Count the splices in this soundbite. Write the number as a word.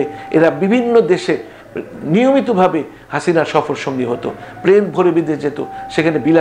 zero